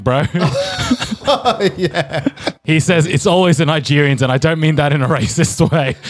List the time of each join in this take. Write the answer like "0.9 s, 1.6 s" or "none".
2.6 s